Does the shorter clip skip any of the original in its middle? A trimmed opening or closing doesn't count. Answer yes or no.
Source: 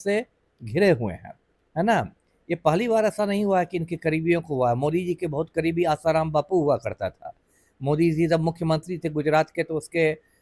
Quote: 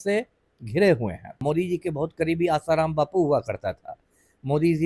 yes